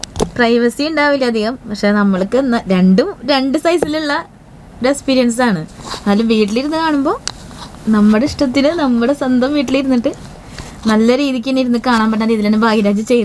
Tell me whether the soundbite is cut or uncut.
uncut